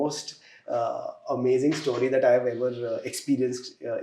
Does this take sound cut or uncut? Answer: uncut